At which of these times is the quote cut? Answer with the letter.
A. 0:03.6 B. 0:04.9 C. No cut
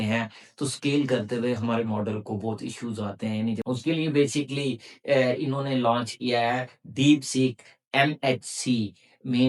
A